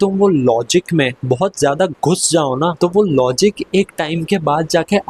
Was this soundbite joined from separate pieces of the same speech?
yes; 2 cuts; at 1.2 s, 2.7 s

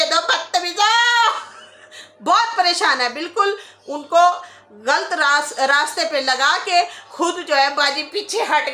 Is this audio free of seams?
yes; 0 cuts

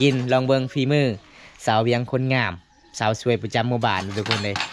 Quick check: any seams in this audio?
no; 0 cuts

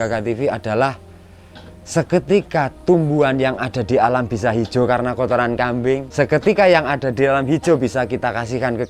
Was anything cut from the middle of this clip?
yes; 1 cut; at 6.1 s

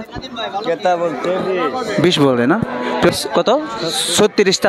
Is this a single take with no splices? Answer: no; 1 cut; at 3.1 s

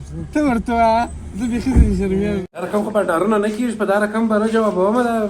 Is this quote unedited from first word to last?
no; 1 cut; at 2.5 s

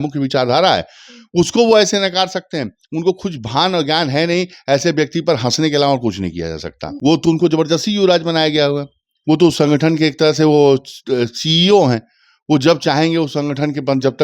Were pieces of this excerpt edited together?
yes; 1 cut; at 6.8 s

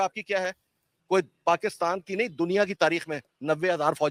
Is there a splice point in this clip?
no; 0 cuts

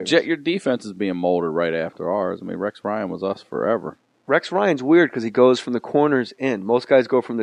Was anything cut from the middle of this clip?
no; 0 cuts

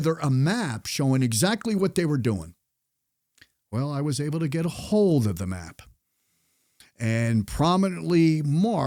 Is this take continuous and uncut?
yes; 0 cuts

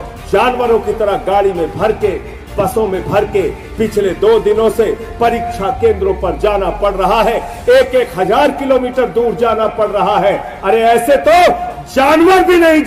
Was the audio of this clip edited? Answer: no; 0 cuts

